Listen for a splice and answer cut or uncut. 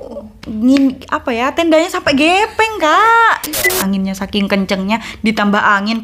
cut